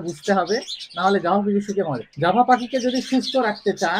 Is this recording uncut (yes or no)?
no